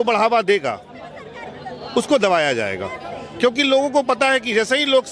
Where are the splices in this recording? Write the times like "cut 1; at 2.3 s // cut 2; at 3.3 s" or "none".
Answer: none

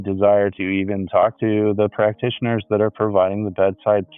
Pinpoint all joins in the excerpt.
none

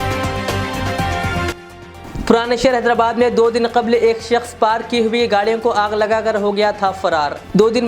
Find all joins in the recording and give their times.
cut 1; at 1.4 s

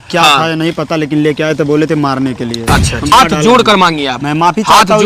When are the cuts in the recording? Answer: cut 1; at 3.1 s

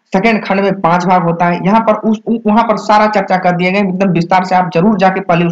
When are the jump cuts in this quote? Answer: none

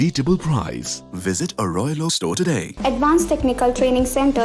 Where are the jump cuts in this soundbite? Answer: cut 1; at 2.7 s

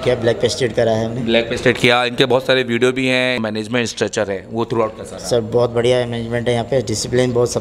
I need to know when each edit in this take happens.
cut 1; at 3.4 s

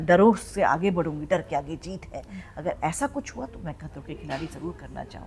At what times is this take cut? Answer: none

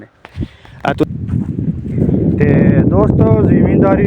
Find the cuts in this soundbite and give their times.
cut 1; at 1.0 s

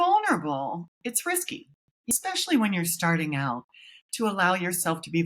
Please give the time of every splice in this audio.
cut 1; at 2.1 s

